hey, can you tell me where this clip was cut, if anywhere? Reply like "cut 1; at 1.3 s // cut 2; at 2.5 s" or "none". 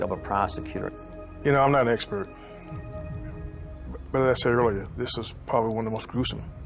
cut 1; at 2.2 s